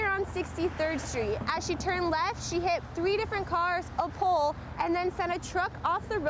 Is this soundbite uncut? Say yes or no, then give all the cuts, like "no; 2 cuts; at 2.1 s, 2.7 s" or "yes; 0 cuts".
yes; 0 cuts